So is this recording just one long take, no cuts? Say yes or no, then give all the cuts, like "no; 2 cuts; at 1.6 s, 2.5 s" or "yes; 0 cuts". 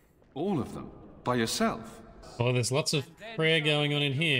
no; 1 cut; at 2.2 s